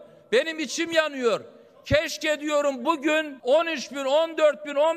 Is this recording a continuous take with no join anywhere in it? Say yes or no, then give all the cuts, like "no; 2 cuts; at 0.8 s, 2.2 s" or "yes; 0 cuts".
no; 1 cut; at 3.3 s